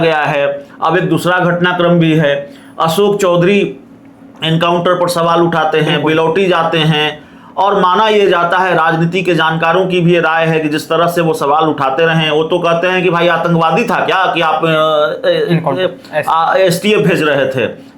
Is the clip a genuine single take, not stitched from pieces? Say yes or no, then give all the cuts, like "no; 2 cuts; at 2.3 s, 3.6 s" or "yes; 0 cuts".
yes; 0 cuts